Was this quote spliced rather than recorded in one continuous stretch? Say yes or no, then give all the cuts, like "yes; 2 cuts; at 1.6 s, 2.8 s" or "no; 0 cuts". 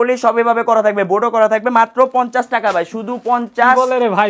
no; 0 cuts